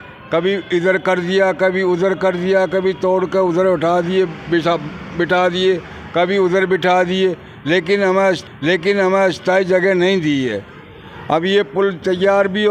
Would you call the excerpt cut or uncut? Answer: uncut